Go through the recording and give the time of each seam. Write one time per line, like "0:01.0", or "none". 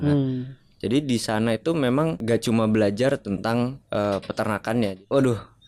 0:02.2
0:03.8
0:04.9